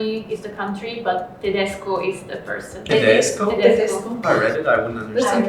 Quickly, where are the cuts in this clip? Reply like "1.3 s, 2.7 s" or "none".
none